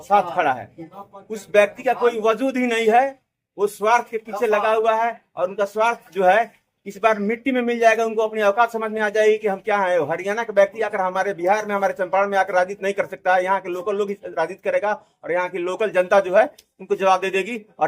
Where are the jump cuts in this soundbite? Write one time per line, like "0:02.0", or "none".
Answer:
none